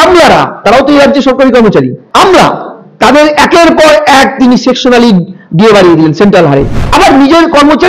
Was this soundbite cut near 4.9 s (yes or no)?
no